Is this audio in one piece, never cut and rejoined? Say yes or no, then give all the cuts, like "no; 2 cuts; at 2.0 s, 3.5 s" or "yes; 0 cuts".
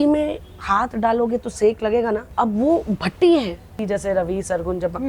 no; 2 cuts; at 2.3 s, 3.7 s